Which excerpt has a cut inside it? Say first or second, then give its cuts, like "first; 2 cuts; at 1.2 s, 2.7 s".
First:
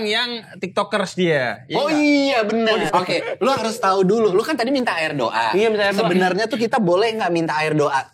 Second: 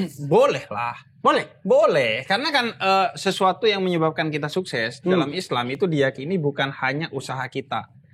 first; 1 cut; at 2.9 s